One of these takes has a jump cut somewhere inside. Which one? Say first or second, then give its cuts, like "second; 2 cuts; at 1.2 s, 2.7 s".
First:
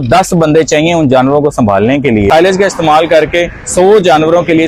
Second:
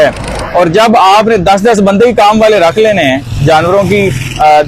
first; 1 cut; at 2.3 s